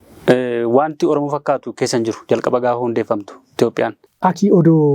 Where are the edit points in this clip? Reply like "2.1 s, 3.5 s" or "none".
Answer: 4.0 s